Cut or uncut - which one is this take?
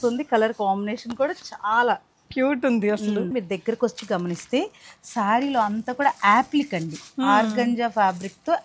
cut